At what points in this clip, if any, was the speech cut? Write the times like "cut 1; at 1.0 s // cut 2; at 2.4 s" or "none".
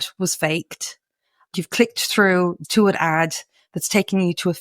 cut 1; at 1.6 s